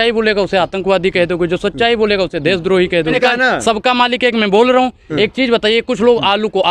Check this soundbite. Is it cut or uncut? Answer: cut